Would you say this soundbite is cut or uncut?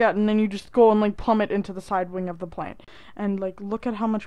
cut